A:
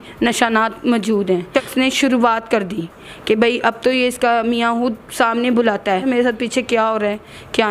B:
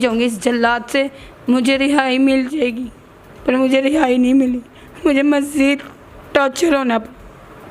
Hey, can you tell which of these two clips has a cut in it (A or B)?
A